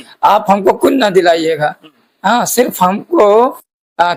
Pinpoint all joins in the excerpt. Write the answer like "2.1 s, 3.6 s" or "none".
none